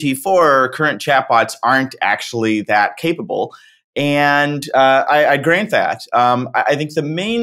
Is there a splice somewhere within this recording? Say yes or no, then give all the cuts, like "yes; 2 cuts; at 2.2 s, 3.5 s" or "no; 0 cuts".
no; 0 cuts